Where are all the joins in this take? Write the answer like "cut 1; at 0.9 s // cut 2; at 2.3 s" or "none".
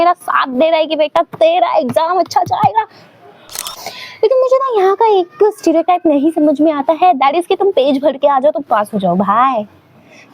cut 1; at 3.8 s